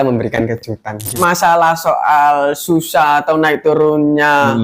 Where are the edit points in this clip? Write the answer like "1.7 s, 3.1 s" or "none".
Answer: 1.1 s